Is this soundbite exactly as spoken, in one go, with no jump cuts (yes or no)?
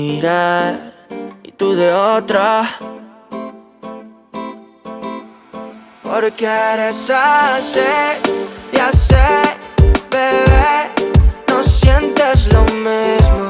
yes